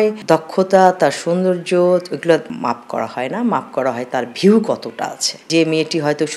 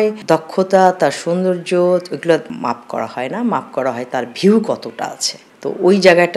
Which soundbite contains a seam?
first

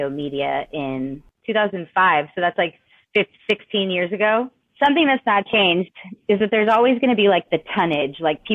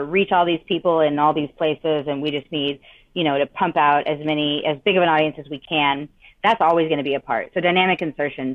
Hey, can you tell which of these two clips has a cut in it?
first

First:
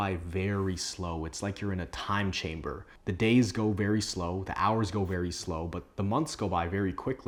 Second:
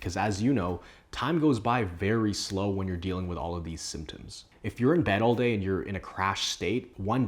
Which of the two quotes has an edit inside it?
second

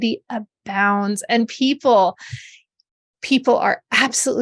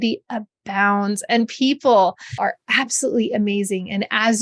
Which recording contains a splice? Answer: second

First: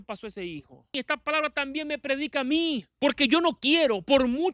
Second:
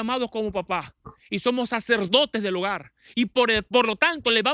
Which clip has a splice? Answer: first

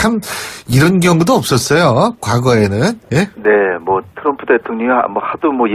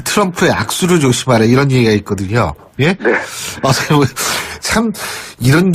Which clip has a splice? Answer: first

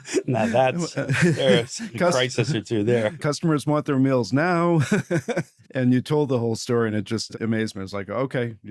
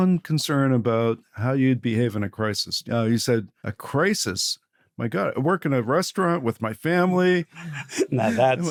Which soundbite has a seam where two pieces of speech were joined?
first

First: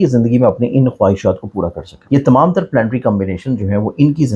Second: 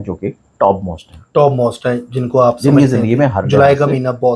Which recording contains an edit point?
first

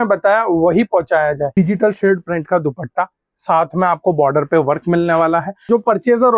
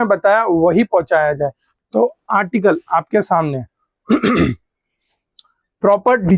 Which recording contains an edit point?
first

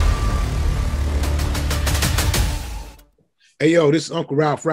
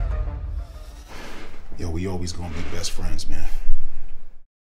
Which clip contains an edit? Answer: first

